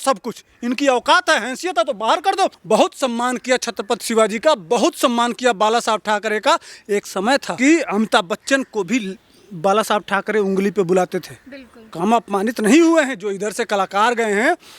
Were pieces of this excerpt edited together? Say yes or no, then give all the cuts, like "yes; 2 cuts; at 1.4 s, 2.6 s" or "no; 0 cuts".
yes; 2 cuts; at 2.6 s, 7.5 s